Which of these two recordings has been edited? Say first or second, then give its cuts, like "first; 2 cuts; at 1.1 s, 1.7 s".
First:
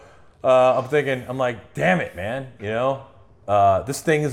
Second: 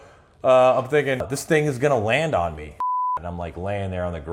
second; 2 cuts; at 1.3 s, 2.8 s